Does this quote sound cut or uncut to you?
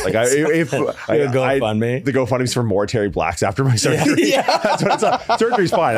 cut